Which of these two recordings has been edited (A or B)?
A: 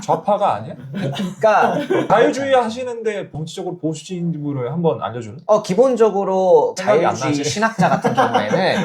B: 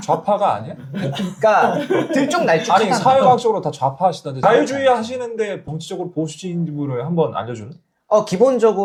A